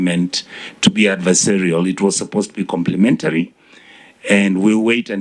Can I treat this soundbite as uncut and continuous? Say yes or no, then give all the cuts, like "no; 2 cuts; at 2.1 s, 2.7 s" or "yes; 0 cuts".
yes; 0 cuts